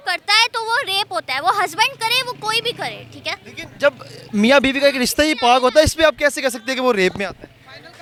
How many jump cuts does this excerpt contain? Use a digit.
0